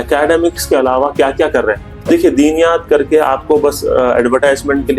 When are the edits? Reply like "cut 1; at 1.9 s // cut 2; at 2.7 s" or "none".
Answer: cut 1; at 2.0 s